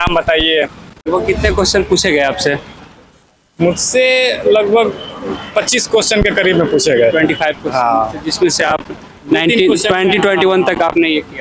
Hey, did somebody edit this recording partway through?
yes; 1 cut; at 1.1 s

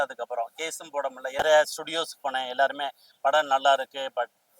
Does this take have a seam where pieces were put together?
yes; 1 cut; at 1.4 s

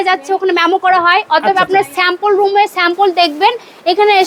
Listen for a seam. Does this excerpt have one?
no; 0 cuts

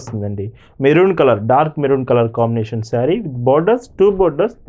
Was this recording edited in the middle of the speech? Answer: no; 0 cuts

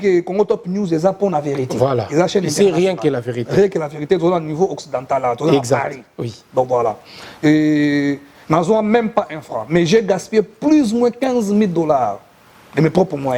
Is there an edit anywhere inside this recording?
no; 0 cuts

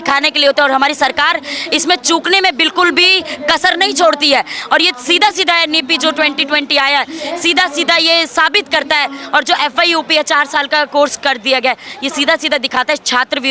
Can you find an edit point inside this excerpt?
no; 0 cuts

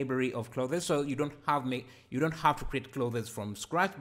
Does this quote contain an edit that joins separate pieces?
no; 0 cuts

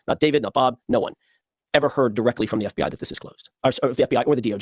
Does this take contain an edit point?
no; 0 cuts

